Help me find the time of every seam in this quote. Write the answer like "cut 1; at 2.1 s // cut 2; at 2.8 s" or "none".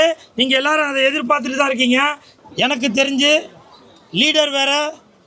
cut 1; at 2.3 s